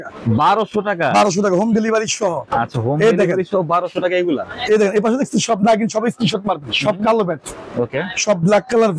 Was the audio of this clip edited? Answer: no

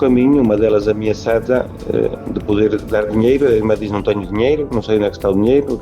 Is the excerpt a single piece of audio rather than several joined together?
yes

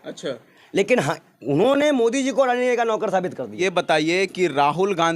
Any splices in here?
yes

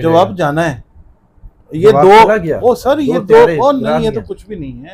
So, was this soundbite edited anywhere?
no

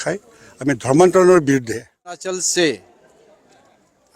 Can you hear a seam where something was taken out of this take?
yes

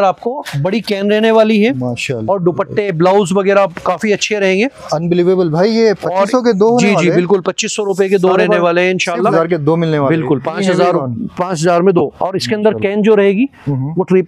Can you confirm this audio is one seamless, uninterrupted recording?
no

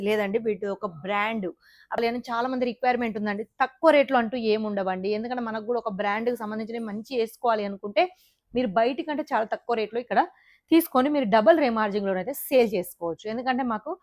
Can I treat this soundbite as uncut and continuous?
no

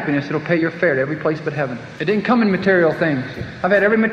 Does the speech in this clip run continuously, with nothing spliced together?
no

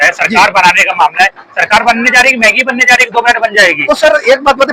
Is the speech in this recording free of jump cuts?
yes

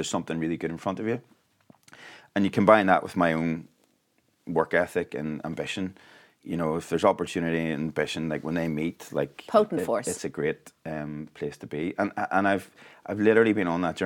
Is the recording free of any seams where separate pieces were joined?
yes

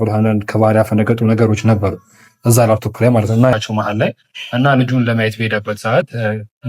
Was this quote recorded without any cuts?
no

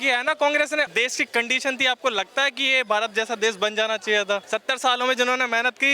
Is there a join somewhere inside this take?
yes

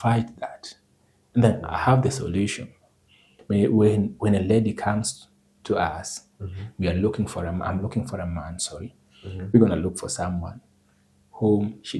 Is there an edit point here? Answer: yes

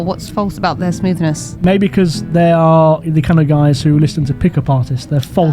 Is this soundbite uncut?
no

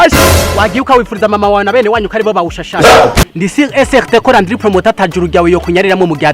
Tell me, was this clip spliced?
yes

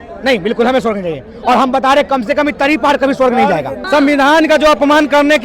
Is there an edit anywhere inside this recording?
yes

